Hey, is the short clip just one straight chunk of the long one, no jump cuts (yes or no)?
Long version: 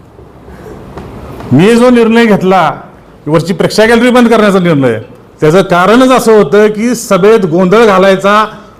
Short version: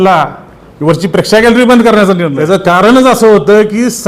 no